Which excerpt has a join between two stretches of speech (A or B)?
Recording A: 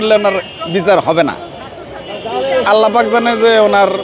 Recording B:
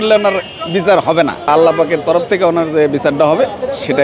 B